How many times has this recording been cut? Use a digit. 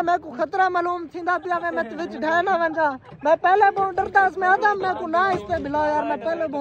0